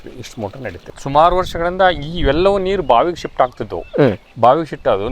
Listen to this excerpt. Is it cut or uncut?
cut